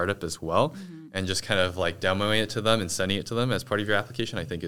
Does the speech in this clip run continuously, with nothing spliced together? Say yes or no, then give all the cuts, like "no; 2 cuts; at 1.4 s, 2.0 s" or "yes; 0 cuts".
yes; 0 cuts